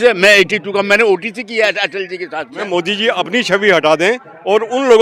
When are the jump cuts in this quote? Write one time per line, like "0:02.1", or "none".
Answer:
0:02.7